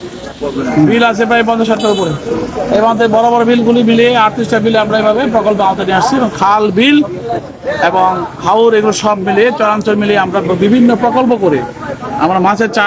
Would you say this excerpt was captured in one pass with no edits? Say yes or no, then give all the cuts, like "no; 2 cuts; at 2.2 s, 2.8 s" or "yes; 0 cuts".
yes; 0 cuts